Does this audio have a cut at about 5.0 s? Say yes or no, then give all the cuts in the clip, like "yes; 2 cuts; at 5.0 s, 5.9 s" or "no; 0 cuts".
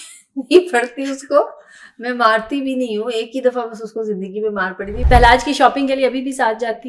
yes; 1 cut; at 5.0 s